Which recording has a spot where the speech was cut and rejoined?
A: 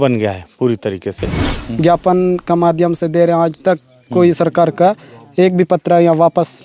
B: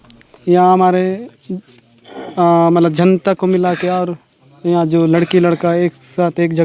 A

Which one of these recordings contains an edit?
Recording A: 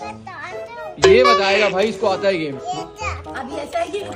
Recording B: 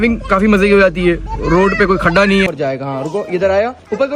B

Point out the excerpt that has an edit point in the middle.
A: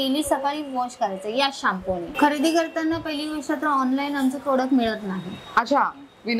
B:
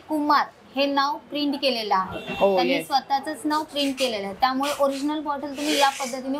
A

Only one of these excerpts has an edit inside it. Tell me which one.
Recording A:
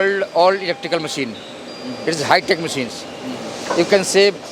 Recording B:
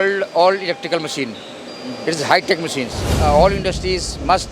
B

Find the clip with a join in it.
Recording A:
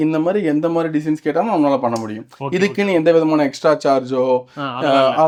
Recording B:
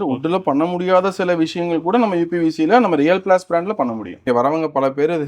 B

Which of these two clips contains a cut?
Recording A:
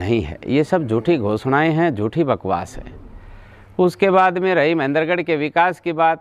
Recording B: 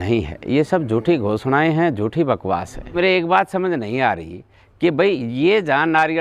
B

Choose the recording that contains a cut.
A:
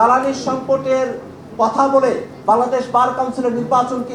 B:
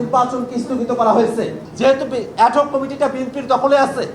B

